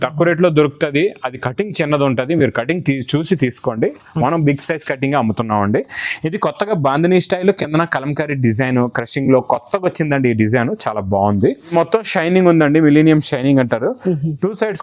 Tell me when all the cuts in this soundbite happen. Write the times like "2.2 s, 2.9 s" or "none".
11.7 s